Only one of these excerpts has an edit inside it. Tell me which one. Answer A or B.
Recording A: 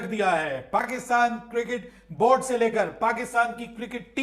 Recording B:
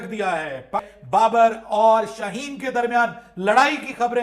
B